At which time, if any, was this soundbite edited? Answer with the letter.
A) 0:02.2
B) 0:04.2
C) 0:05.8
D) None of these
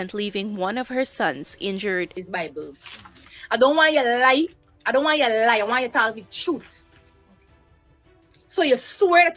A